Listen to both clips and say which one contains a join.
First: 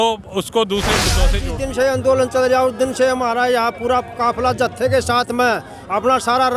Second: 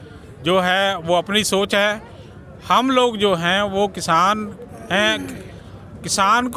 first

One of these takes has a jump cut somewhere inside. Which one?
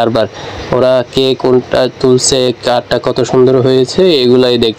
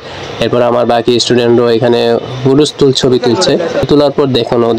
second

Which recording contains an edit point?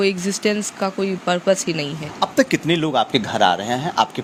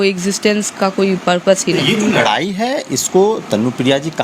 second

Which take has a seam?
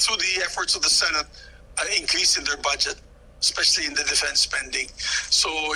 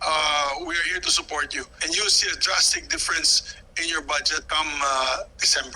second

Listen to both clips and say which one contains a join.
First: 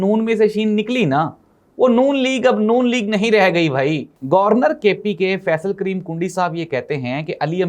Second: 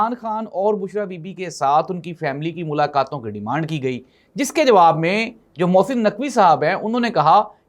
first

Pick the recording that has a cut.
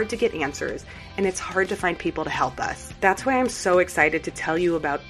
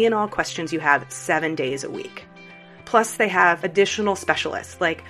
first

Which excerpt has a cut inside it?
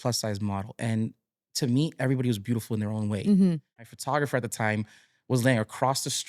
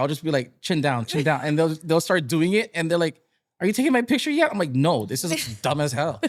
first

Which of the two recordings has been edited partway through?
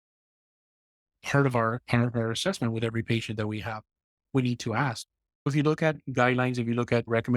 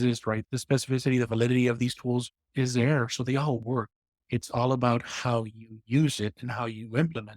first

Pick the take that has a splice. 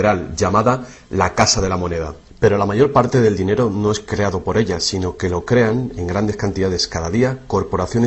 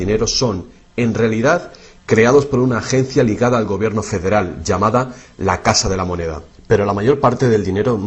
first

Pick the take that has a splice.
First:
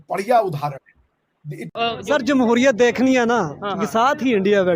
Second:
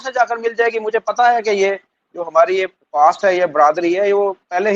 first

